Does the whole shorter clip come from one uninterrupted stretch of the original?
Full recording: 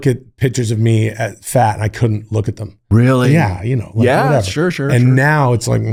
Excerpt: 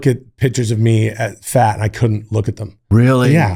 yes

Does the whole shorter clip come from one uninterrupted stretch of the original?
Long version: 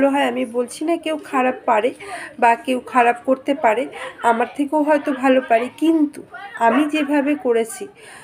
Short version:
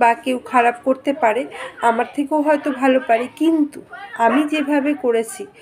yes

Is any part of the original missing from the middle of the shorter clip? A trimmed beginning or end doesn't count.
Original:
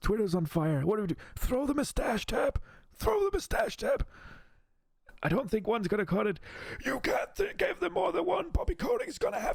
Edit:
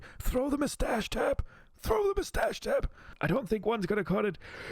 yes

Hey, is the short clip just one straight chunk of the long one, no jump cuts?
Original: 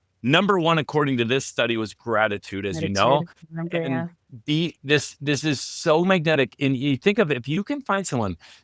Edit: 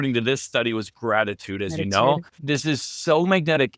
no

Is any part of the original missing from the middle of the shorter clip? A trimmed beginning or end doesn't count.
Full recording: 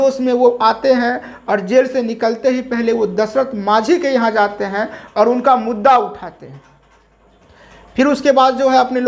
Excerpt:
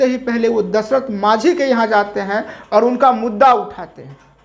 no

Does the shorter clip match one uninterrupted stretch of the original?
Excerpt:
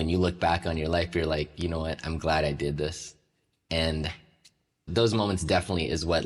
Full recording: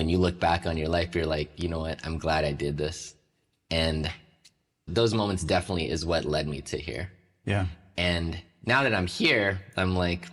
yes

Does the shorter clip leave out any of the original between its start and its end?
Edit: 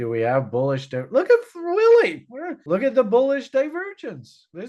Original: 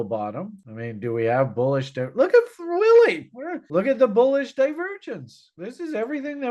no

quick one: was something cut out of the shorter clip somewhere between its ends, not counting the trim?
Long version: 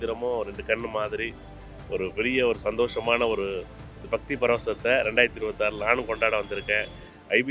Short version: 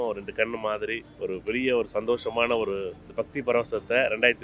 yes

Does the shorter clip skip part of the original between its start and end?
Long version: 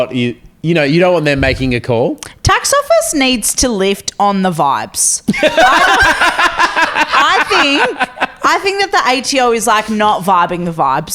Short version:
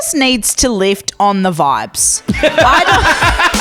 no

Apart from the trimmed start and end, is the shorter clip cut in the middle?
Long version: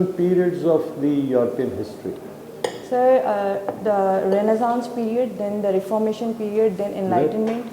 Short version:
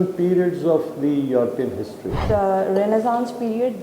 yes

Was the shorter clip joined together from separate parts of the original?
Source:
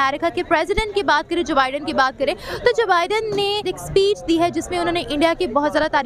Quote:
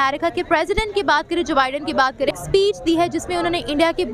yes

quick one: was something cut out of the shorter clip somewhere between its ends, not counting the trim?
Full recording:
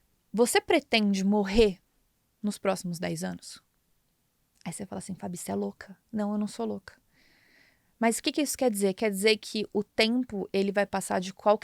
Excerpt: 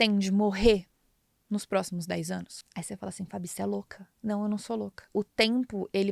yes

